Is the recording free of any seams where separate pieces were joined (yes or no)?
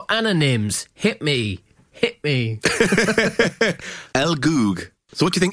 no